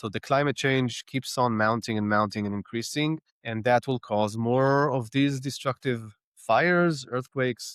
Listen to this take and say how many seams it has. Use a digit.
0